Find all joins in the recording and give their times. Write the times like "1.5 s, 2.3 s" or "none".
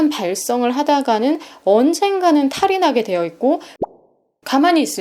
4.1 s